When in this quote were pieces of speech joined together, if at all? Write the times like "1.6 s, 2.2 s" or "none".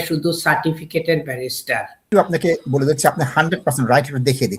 2.0 s